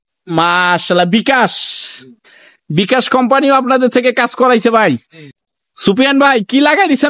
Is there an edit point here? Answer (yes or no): yes